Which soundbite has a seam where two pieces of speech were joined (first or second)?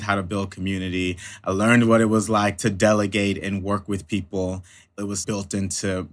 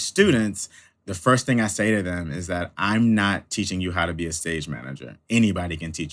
first